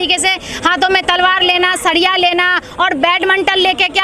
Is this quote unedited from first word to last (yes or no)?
yes